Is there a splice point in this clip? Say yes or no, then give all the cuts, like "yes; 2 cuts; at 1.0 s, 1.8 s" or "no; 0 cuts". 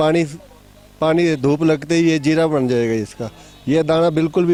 no; 0 cuts